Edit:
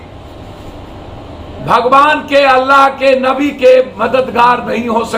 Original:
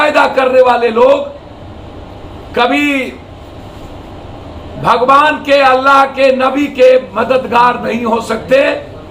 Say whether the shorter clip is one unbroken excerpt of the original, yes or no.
yes